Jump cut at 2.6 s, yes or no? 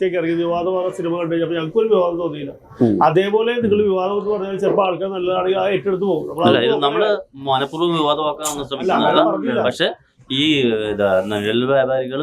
no